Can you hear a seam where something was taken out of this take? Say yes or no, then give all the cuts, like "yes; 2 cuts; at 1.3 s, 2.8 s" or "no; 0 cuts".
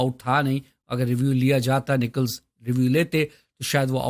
no; 0 cuts